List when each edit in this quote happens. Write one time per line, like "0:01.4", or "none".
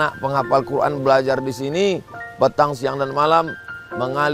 none